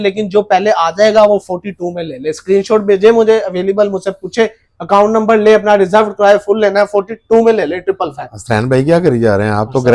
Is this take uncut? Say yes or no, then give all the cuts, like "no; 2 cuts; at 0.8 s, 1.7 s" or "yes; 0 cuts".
yes; 0 cuts